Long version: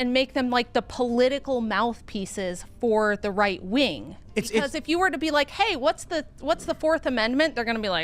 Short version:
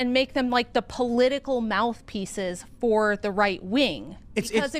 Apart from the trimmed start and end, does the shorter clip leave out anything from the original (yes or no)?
no